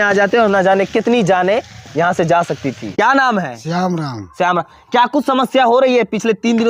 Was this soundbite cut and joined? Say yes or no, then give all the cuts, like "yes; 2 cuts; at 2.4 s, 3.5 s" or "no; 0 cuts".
no; 0 cuts